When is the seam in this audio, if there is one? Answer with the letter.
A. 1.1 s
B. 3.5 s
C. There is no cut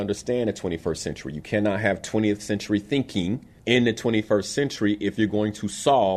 B